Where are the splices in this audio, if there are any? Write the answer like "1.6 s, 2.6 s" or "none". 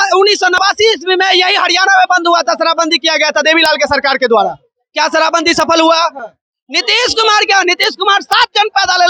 none